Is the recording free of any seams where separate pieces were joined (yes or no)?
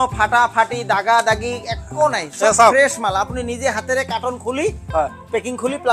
yes